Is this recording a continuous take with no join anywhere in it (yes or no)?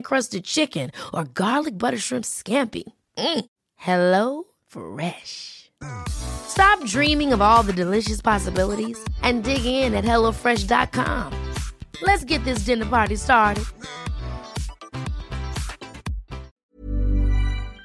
no